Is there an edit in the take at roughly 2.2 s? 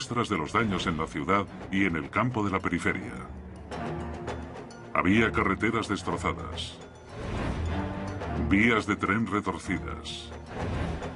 no; 1 cut; at 4.2 s

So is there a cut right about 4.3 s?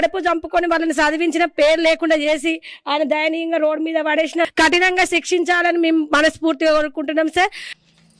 no; 0 cuts

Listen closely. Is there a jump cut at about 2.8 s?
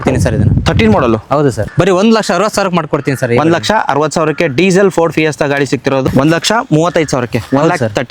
no; 2 cuts; at 1.6 s, 6.0 s

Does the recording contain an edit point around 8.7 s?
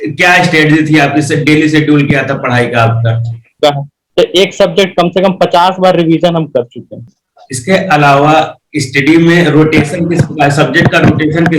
no; 2 cuts; at 3.5 s, 7.2 s

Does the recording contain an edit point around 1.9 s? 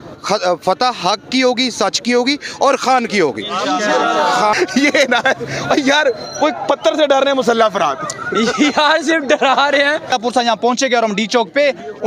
no; 2 cuts; at 4.5 s, 10.1 s

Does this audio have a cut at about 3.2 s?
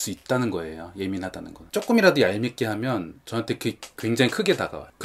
no; 1 cut; at 1.6 s

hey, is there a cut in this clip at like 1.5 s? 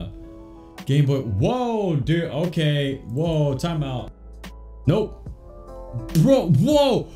no; 1 cut; at 3.9 s

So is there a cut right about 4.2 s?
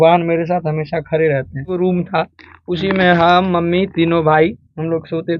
no; 1 cut; at 1.8 s

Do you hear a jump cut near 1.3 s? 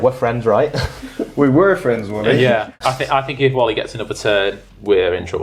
no; 1 cut; at 2.7 s

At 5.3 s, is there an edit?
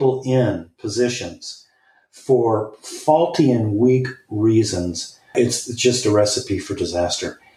yes; 1 cut; at 5.3 s

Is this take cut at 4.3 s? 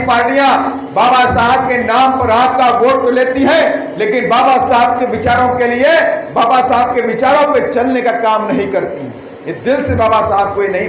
no; 0 cuts

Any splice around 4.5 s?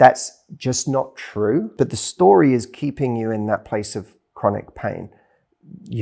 no; 1 cut; at 1.7 s

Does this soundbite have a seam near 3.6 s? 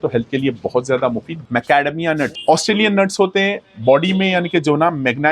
no; 2 cuts; at 1.3 s, 2.4 s

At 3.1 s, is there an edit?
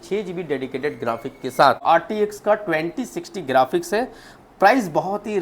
no; 1 cut; at 1.8 s

